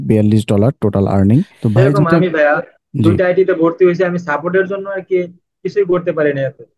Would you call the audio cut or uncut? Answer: cut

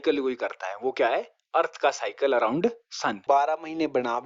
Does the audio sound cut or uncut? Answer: cut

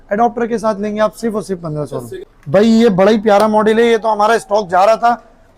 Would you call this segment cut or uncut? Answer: cut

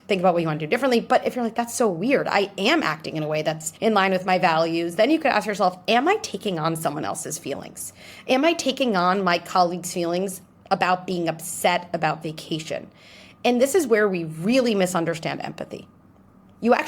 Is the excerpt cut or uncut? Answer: cut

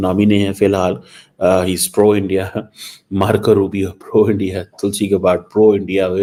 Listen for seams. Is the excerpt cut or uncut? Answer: uncut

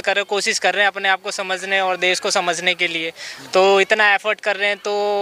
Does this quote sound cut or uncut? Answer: uncut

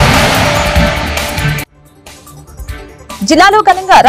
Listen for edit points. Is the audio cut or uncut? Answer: cut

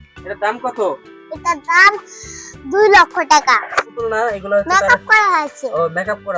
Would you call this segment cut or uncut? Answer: cut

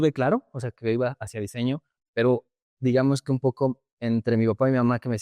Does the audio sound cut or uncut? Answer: uncut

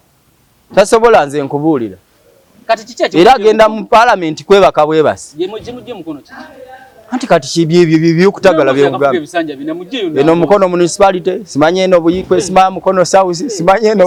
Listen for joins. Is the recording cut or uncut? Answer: uncut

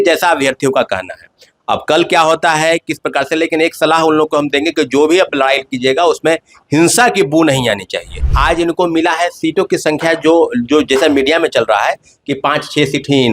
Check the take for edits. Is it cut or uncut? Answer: cut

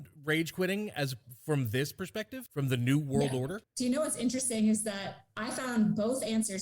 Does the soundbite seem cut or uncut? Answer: cut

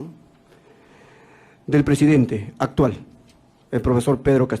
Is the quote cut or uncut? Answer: uncut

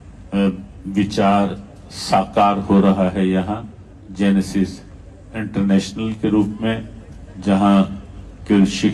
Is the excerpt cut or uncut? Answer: uncut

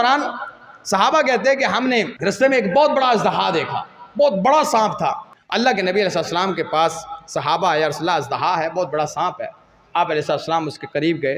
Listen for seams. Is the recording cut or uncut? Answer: cut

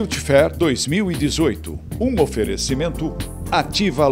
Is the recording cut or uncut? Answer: uncut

